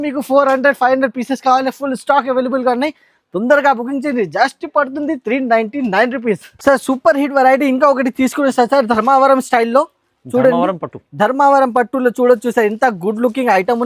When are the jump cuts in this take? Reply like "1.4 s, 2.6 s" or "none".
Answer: none

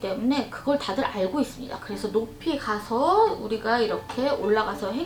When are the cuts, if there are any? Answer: none

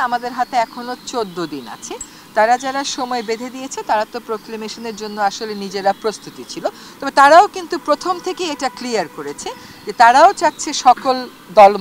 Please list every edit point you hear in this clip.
none

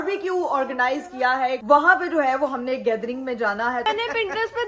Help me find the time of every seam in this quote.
1.6 s, 3.8 s

